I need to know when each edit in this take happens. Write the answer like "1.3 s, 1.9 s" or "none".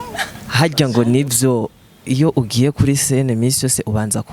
none